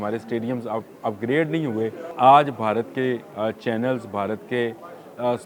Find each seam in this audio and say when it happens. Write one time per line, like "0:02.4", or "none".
0:02.0